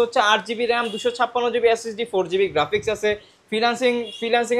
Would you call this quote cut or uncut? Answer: uncut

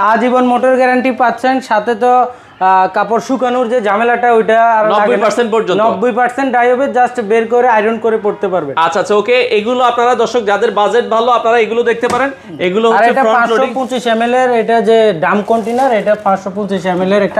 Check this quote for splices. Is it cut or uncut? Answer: uncut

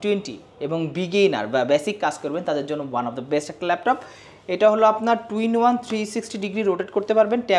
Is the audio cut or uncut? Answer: uncut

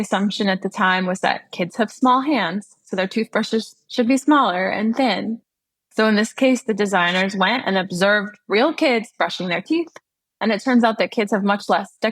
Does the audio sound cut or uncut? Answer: cut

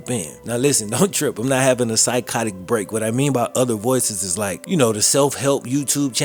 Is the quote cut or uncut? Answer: uncut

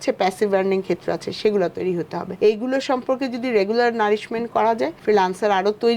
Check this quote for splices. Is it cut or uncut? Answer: cut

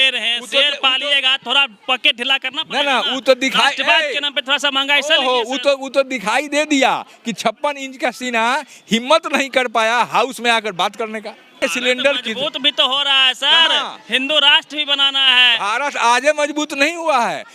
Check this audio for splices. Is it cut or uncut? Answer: cut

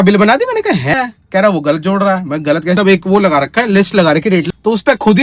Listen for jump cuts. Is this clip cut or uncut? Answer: cut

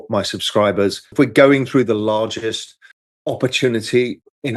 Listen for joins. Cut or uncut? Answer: cut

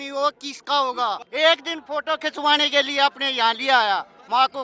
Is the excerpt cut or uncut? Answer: cut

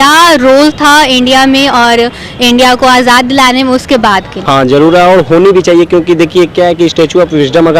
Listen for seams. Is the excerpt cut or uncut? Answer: cut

